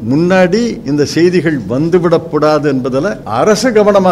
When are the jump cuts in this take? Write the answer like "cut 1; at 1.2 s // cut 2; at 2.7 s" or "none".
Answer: cut 1; at 3.2 s